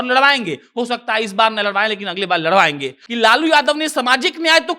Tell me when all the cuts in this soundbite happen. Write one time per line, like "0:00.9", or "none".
0:03.0